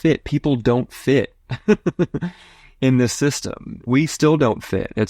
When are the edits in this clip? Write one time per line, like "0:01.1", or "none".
0:03.9